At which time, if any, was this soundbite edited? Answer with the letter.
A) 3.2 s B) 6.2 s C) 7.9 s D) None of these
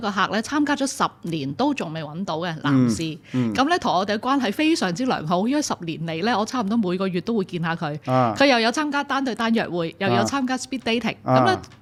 D